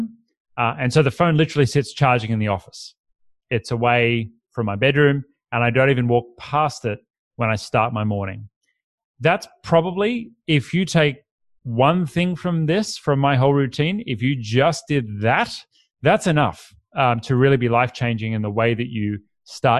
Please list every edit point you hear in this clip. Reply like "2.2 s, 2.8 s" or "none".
none